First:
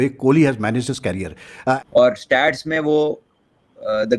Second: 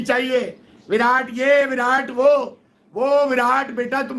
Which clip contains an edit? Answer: first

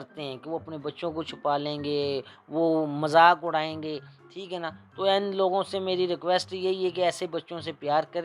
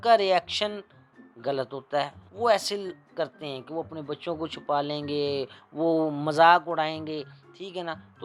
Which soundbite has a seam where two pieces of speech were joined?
second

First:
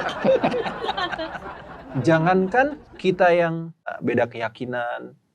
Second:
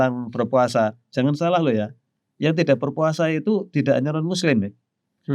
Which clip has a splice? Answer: first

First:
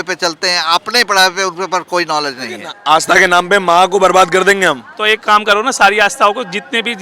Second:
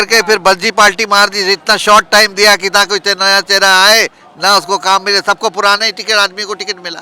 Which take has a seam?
first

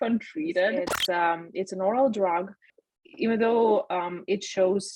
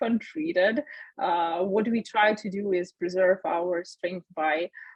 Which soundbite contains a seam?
first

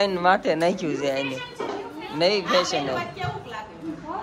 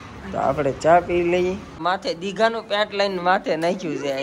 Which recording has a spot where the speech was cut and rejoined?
second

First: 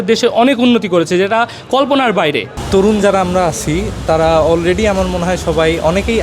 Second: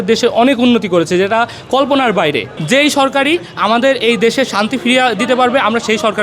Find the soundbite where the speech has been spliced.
second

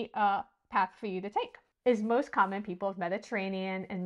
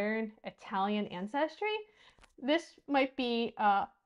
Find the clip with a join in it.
first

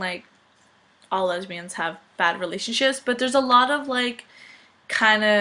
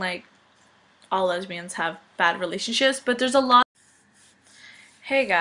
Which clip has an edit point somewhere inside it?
first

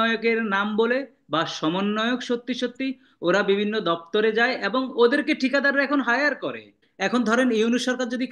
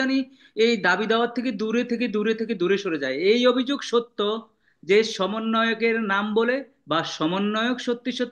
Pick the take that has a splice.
first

